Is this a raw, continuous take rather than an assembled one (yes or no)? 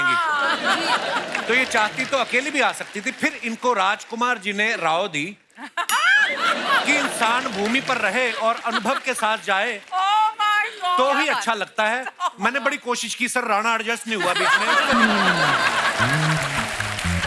yes